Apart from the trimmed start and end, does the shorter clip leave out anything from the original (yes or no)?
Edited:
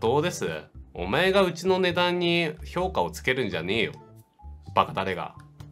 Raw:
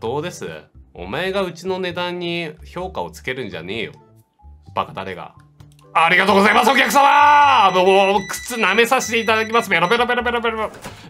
no